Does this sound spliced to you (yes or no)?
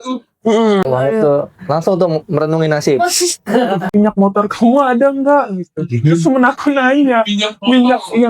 yes